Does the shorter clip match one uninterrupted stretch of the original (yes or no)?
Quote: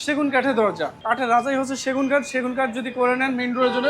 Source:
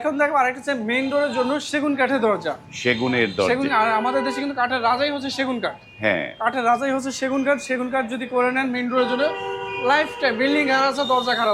no